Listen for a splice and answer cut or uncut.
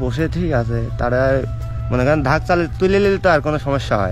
uncut